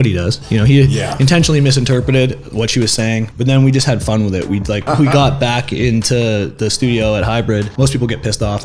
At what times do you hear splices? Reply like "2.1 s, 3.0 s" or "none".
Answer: 3.3 s, 4.8 s, 7.7 s